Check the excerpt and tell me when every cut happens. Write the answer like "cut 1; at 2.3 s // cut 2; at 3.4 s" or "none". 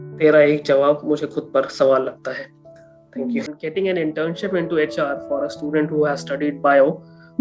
cut 1; at 3.5 s